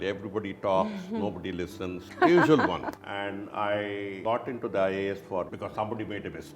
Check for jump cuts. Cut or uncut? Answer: cut